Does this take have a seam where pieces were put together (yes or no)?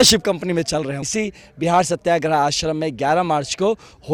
yes